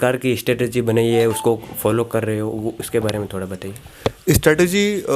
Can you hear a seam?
no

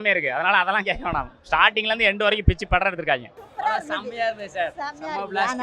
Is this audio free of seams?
no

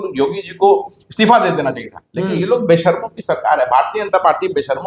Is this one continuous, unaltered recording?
yes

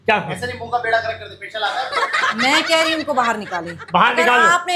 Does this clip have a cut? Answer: no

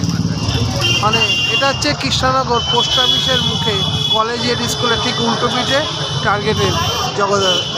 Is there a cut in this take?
no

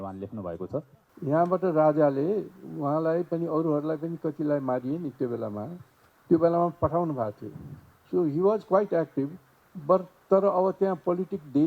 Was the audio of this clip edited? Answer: yes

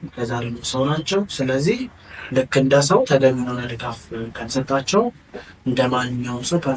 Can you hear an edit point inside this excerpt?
no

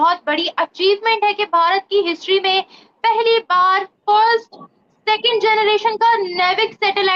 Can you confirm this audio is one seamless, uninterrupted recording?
yes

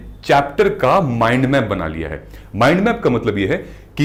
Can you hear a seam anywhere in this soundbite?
no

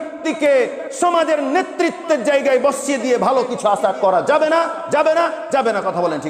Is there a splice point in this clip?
no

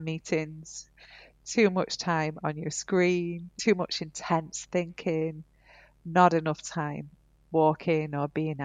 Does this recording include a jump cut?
yes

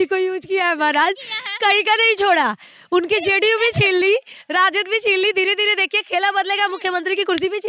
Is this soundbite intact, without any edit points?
yes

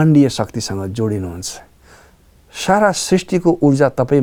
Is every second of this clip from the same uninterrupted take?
yes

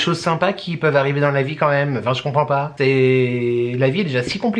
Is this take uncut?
yes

